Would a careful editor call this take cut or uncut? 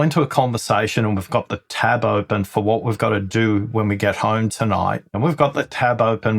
cut